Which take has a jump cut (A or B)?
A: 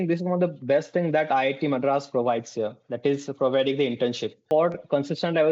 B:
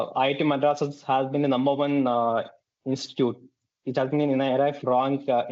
A